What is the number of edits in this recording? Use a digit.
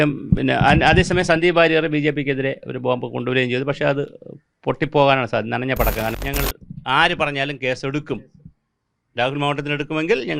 1